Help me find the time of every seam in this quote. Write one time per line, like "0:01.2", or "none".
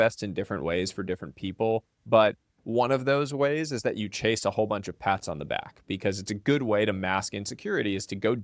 0:02.5